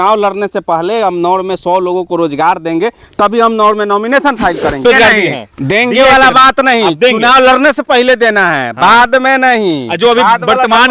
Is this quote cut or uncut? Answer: cut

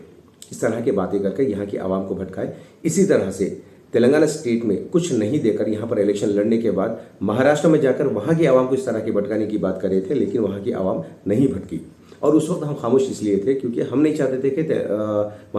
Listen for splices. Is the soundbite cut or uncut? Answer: uncut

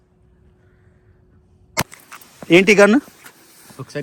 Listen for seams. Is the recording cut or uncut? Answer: cut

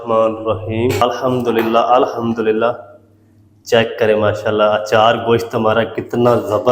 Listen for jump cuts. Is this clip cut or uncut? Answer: cut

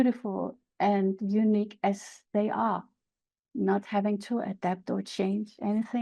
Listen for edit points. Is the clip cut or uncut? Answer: uncut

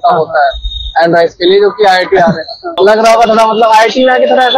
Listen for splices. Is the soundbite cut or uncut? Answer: cut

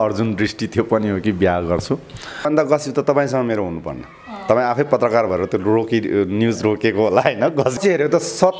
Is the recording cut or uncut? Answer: cut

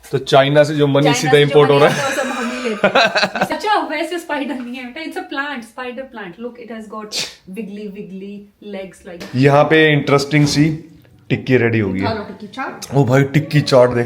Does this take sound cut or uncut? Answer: cut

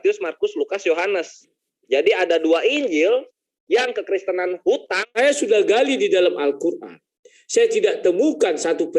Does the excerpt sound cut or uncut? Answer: cut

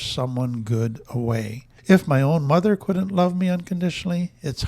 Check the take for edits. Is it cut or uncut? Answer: cut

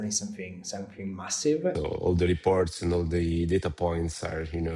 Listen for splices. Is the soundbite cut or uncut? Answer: cut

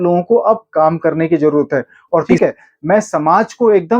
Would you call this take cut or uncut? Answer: cut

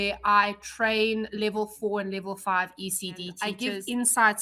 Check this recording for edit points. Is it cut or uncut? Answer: cut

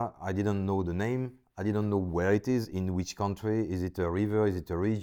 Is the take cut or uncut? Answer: uncut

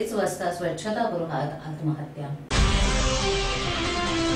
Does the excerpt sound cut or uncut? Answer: cut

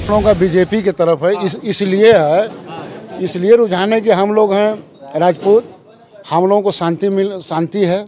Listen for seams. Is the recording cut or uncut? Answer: uncut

